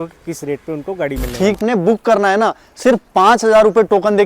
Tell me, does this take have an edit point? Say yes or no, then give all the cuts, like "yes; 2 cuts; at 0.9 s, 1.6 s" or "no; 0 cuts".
yes; 1 cut; at 1.6 s